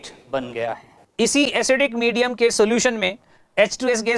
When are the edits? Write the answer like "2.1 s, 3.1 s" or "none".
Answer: 1.1 s